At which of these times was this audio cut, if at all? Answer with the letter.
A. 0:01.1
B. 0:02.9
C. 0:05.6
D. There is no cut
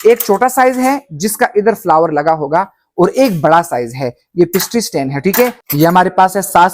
C